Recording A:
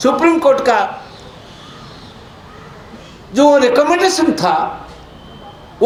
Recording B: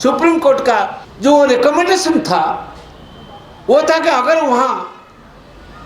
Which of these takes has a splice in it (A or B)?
B